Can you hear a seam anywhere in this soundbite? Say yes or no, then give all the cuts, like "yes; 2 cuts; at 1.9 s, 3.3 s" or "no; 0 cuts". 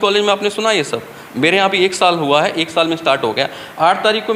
no; 0 cuts